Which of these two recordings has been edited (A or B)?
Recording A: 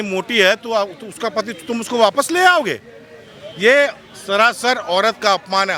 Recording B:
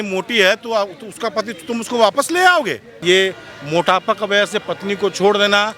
B